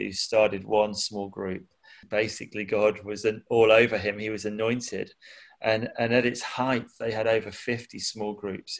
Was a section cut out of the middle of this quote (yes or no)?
yes